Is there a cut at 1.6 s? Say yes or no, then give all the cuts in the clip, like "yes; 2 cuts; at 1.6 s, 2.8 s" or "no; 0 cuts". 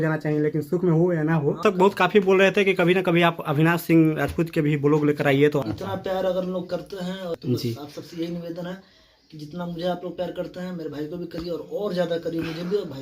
yes; 3 cuts; at 1.6 s, 5.6 s, 7.4 s